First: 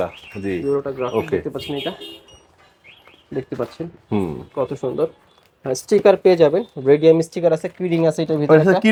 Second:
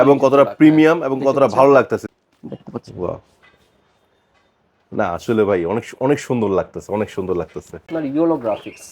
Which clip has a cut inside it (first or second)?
second